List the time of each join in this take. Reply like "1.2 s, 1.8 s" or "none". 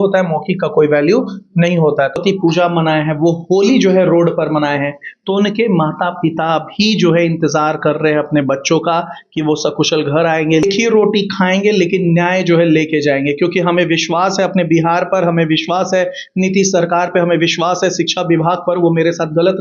2.2 s, 10.6 s